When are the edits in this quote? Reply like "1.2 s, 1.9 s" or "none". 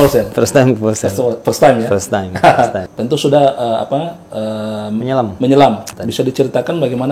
2.9 s, 5.9 s